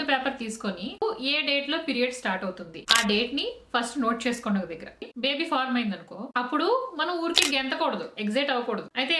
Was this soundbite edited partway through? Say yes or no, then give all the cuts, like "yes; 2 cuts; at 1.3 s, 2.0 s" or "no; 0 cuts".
yes; 2 cuts; at 1.0 s, 5.0 s